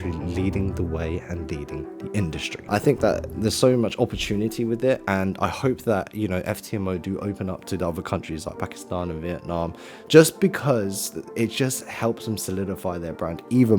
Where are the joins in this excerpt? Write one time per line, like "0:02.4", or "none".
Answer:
0:02.5